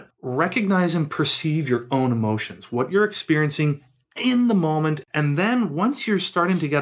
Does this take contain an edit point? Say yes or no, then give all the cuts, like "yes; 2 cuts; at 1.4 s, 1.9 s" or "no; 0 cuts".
yes; 1 cut; at 5.1 s